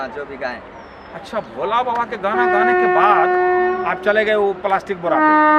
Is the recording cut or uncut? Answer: uncut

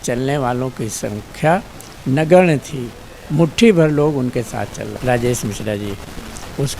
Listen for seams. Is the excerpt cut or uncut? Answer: cut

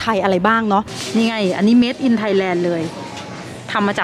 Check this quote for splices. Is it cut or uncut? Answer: cut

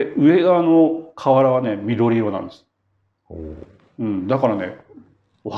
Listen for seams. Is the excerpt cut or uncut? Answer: uncut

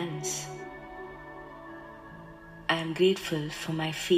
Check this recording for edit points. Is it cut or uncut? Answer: uncut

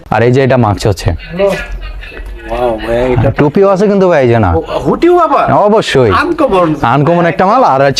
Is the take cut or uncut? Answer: uncut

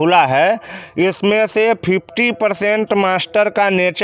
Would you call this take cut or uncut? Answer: uncut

